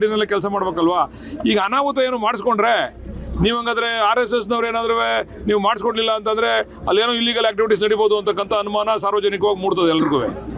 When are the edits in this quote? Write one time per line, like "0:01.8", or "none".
none